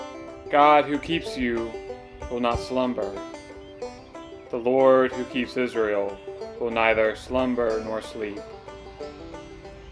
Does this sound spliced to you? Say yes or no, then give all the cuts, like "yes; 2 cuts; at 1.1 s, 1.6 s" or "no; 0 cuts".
yes; 2 cuts; at 3.1 s, 4.5 s